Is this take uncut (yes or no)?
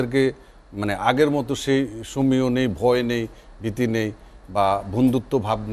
yes